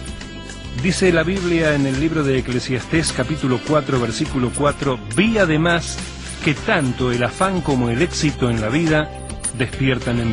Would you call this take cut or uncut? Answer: uncut